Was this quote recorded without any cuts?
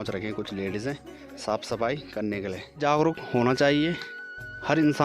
no; 1 cut; at 2.8 s

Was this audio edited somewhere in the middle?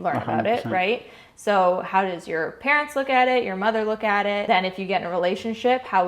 yes; 1 cut; at 4.4 s

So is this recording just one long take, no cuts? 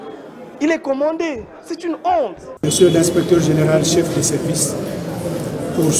no; 1 cut; at 2.4 s

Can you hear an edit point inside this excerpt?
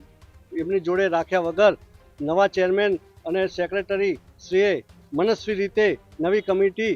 no; 0 cuts

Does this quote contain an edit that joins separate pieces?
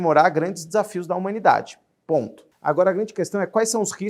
yes; 1 cut; at 2.4 s

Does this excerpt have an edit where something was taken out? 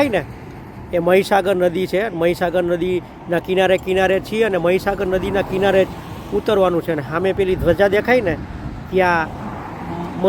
no; 0 cuts

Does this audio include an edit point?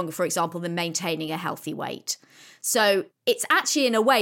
yes; 1 cut; at 3.1 s

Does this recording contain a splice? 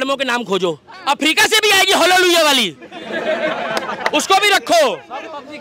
yes; 1 cut; at 0.9 s

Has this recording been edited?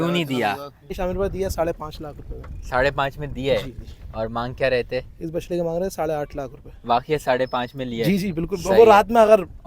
yes; 1 cut; at 1.0 s

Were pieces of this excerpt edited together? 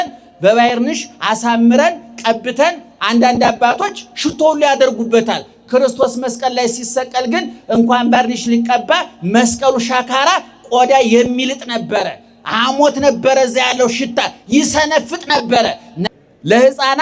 yes; 1 cut; at 15.9 s

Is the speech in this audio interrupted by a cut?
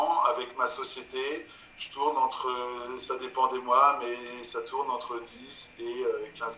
no; 0 cuts

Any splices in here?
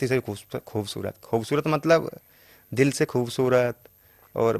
no; 0 cuts

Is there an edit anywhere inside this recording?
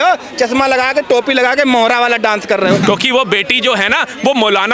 yes; 1 cut; at 2.8 s

